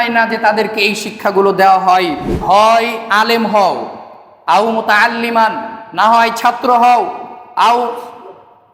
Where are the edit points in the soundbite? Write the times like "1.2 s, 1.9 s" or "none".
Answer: 2.3 s